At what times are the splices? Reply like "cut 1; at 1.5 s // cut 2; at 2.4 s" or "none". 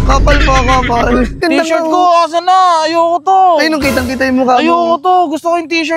cut 1; at 1.4 s